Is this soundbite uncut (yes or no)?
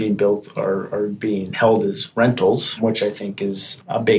no